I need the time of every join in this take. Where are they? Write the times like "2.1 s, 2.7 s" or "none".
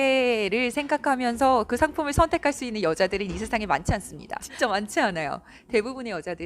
4.5 s